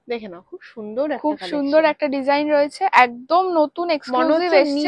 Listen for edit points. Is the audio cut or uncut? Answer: uncut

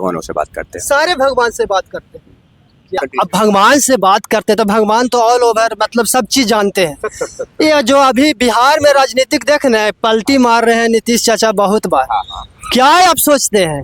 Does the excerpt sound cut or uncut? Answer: cut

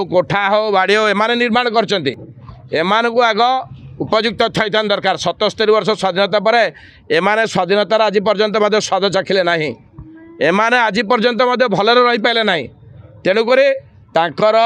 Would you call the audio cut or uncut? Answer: uncut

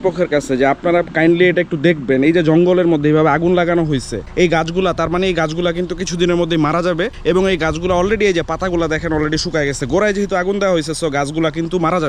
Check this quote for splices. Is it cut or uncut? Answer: uncut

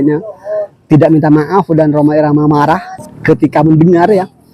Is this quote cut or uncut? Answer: cut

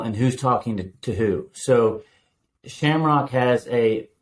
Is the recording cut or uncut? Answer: uncut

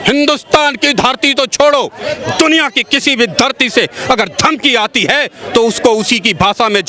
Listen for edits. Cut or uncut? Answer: uncut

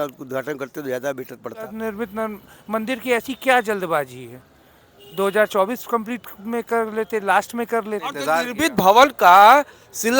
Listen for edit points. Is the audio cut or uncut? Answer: cut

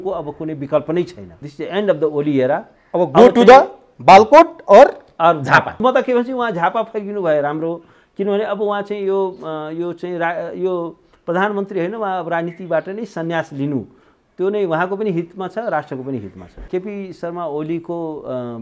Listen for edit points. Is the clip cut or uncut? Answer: cut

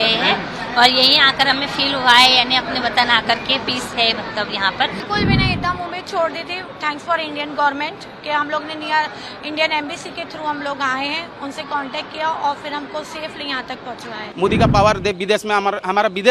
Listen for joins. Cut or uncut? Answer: cut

